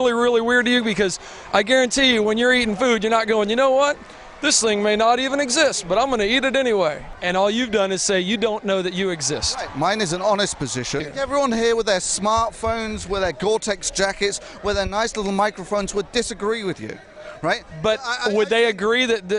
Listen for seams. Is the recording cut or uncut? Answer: cut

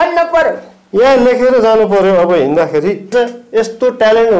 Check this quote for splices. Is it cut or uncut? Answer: cut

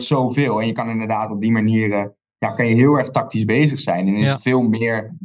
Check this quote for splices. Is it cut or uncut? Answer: uncut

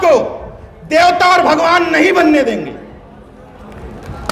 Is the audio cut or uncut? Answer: uncut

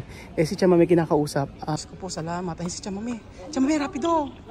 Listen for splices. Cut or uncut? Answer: cut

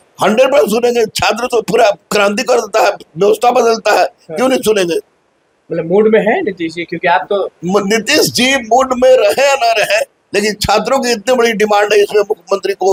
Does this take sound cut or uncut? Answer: uncut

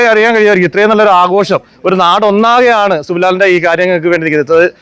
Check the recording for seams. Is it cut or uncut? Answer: uncut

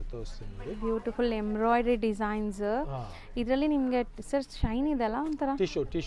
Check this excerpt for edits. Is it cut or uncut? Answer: uncut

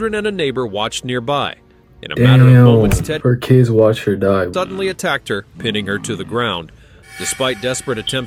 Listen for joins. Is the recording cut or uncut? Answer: uncut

